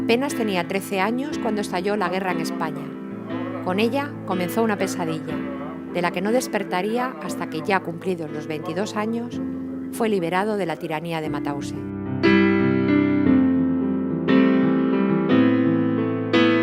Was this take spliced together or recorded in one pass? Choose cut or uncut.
cut